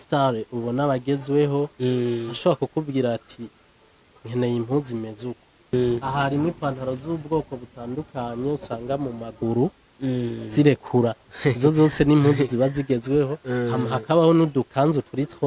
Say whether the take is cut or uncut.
cut